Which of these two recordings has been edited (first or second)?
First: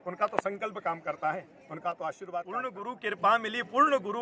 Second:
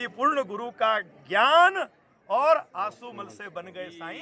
first